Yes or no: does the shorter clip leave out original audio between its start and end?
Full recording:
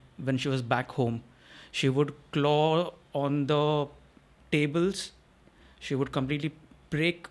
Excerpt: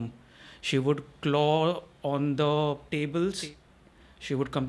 yes